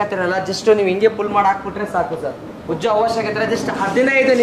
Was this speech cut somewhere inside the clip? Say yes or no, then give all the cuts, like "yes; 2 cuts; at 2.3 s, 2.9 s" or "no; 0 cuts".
no; 0 cuts